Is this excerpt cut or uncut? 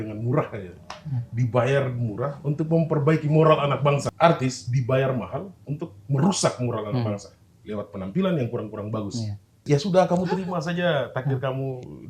cut